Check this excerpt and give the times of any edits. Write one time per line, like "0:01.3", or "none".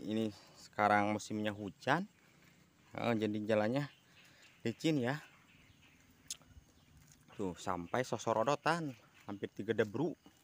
none

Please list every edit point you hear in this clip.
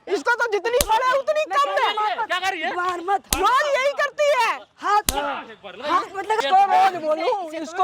0:06.4

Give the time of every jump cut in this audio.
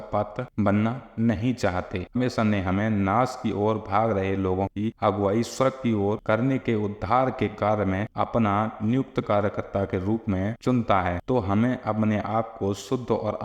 0:02.1

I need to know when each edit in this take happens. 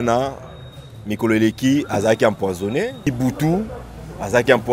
0:03.1

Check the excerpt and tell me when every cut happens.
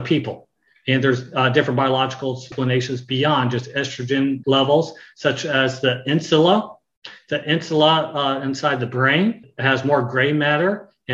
0:02.5
0:04.4
0:09.5

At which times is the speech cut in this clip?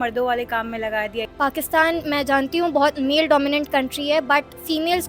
0:01.3

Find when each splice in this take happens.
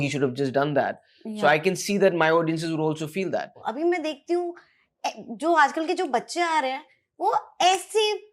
0:03.6

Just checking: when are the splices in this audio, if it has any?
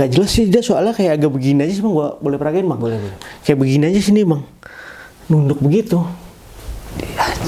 none

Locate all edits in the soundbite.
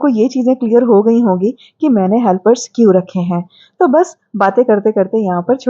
none

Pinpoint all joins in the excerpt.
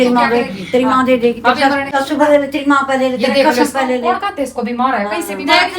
0:02.0

